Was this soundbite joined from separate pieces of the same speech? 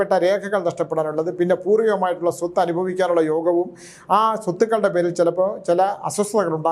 no; 0 cuts

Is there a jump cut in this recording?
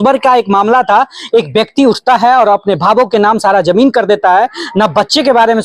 no; 0 cuts

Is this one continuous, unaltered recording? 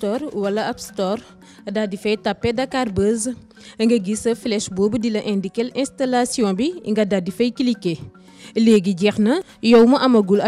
no; 1 cut; at 9.5 s

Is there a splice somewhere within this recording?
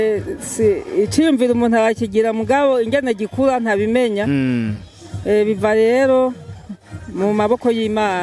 no; 0 cuts

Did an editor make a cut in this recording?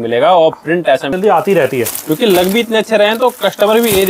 yes; 1 cut; at 1.1 s

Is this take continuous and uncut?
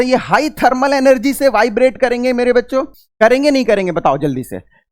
no; 1 cut; at 3.0 s

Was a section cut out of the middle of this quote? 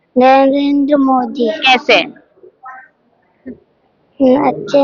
no; 0 cuts

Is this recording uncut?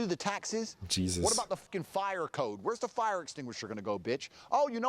no; 1 cut; at 1.7 s

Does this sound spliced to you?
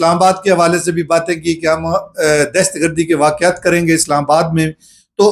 no; 0 cuts

